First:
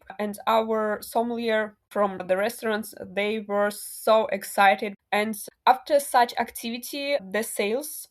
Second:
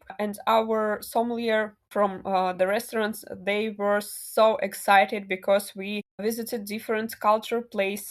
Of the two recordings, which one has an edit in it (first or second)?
first